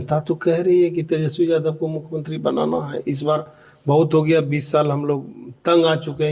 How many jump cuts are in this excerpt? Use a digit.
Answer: 0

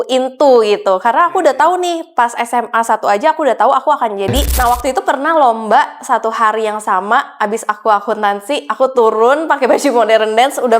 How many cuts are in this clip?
1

